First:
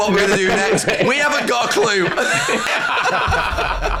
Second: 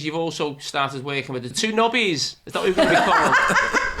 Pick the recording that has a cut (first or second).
second